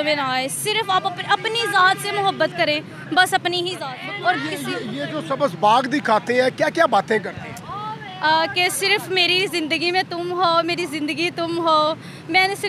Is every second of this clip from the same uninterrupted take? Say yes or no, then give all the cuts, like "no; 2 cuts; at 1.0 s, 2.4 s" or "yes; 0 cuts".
no; 1 cut; at 3.9 s